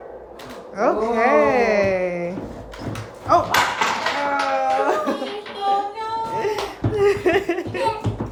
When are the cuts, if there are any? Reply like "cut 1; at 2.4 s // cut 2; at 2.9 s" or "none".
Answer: none